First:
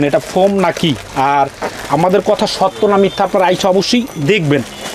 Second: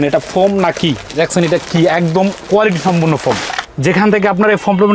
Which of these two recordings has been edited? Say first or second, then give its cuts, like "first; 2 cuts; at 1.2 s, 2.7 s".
second; 2 cuts; at 1.0 s, 3.6 s